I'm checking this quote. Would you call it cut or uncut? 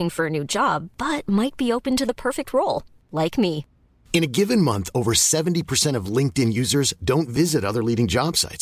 uncut